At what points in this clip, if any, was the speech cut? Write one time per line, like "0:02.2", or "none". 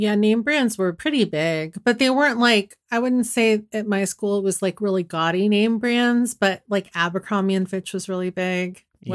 0:01.0